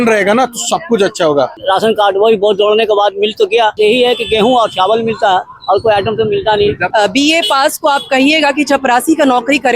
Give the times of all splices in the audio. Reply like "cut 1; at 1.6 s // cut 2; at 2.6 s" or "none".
cut 1; at 1.6 s // cut 2; at 3.8 s // cut 3; at 6.8 s